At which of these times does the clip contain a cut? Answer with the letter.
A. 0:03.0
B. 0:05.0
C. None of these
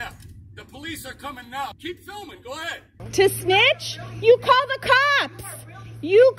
A